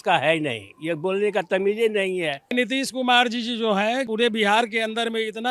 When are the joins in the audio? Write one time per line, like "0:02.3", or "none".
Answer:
0:02.5
0:04.1